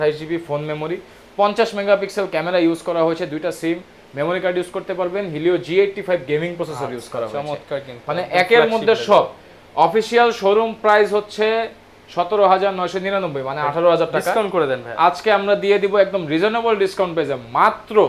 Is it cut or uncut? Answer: uncut